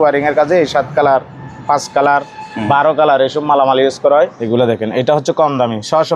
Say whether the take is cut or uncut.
cut